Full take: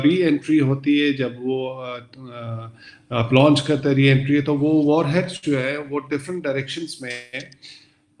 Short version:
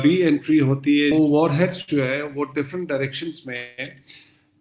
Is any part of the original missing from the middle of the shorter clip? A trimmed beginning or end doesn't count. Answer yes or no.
yes